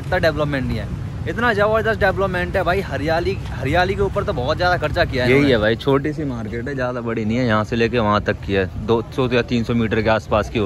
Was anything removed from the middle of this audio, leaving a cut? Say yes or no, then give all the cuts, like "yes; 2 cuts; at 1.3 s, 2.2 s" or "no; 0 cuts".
yes; 1 cut; at 5.2 s